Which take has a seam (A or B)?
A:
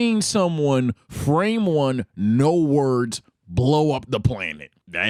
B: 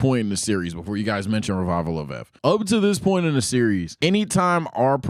B